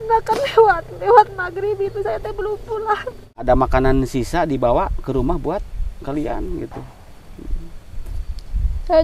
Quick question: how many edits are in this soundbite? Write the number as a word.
one